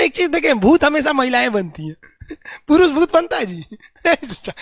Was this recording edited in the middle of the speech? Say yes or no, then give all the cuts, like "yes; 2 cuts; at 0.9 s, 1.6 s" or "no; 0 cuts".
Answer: no; 0 cuts